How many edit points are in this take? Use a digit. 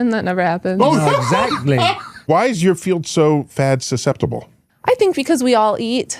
1